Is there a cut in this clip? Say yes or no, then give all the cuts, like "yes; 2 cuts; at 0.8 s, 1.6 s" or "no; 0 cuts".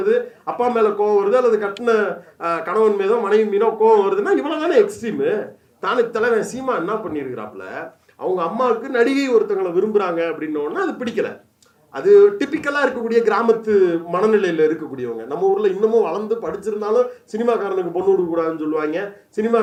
no; 0 cuts